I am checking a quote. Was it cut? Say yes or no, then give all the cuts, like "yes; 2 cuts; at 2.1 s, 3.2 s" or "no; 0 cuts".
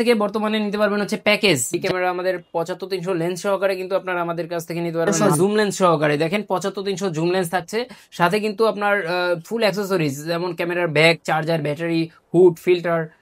yes; 2 cuts; at 1.7 s, 5.1 s